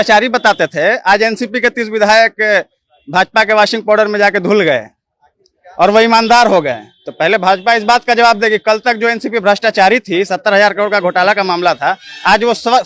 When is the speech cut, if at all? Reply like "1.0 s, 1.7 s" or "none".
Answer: none